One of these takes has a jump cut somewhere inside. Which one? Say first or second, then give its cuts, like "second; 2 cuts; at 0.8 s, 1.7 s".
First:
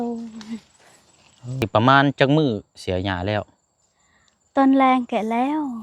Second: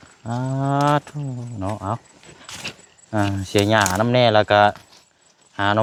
first; 1 cut; at 1.7 s